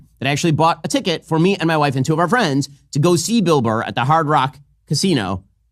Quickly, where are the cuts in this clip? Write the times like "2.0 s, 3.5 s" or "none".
none